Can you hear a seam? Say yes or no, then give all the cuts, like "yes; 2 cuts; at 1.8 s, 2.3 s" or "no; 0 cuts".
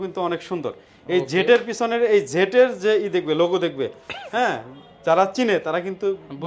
no; 0 cuts